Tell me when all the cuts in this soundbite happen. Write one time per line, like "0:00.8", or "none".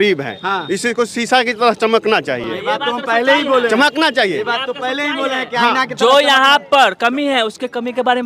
none